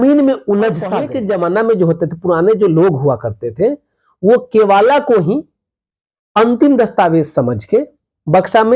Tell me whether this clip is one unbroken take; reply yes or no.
no